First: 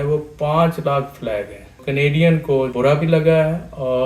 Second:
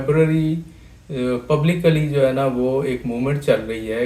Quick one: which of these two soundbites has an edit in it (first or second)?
first